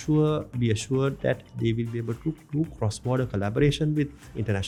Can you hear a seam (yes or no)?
no